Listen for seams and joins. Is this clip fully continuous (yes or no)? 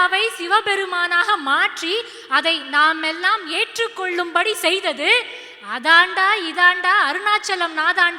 yes